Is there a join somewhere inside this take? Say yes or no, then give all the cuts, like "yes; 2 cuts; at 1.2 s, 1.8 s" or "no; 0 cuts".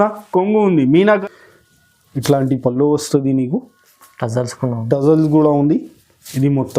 yes; 1 cut; at 1.2 s